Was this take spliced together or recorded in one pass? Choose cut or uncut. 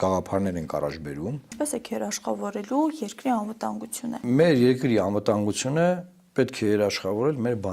cut